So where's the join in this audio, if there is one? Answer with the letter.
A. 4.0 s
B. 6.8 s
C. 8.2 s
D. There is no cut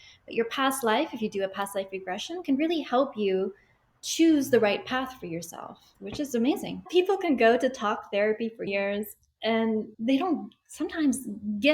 B